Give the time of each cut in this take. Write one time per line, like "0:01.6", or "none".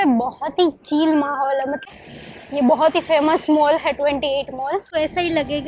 0:01.9
0:04.9